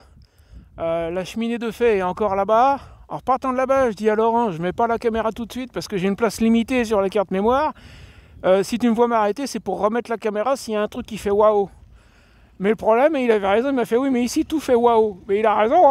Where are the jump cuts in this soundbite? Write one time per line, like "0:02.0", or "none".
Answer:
none